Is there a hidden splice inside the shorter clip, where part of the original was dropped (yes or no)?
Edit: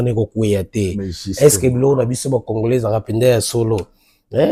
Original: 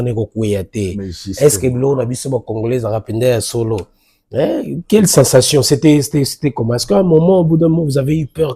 no